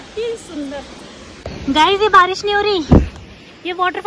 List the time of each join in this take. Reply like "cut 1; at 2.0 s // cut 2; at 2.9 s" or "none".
cut 1; at 1.4 s